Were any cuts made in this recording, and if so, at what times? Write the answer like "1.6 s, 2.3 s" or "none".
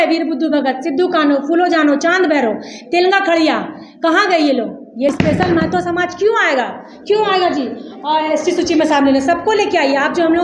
5.1 s